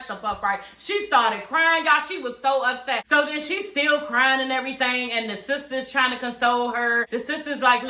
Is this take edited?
yes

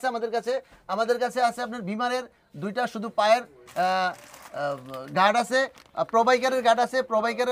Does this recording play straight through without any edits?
yes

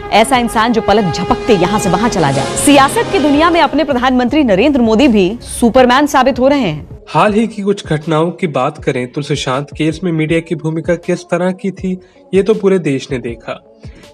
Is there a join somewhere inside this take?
no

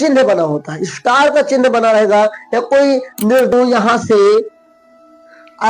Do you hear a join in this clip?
yes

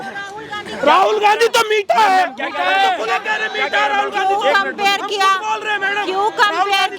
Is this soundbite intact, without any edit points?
yes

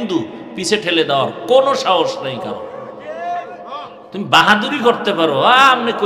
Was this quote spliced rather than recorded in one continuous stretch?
no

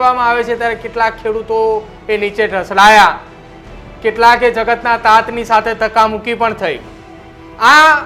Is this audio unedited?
yes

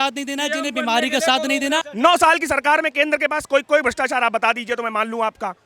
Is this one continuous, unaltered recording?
no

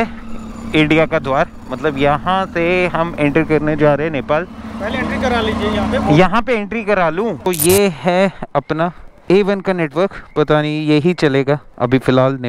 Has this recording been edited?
yes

